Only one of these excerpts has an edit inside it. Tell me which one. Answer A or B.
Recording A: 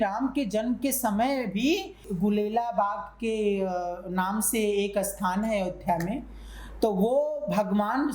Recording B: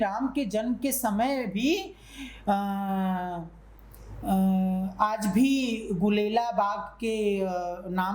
A